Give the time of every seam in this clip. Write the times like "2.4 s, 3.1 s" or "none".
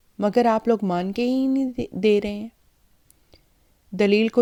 none